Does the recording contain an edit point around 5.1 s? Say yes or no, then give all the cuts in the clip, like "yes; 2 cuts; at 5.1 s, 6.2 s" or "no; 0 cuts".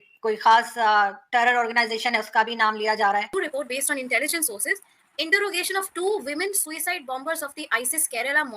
no; 1 cut; at 3.3 s